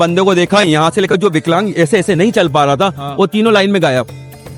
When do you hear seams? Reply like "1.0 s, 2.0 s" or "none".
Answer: none